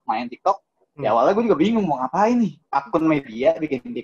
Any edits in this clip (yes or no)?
yes